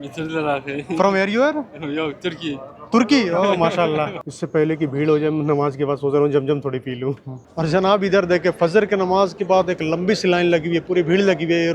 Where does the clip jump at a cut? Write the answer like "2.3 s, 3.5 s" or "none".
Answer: 4.2 s, 7.5 s